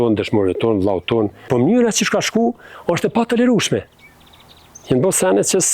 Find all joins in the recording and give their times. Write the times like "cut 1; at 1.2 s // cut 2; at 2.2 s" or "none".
cut 1; at 1.5 s